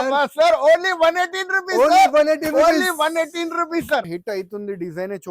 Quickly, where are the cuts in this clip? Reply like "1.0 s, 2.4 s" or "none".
4.1 s